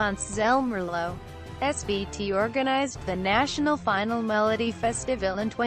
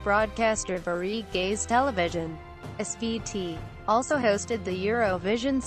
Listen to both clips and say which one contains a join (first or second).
first